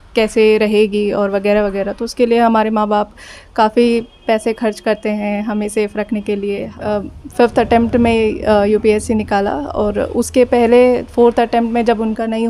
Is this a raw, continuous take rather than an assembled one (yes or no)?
no